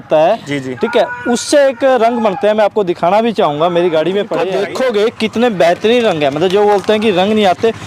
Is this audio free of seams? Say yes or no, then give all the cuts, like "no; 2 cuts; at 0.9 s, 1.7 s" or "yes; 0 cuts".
no; 1 cut; at 4.5 s